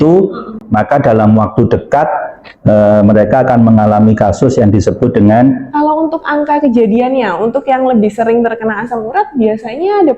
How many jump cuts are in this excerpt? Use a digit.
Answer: 1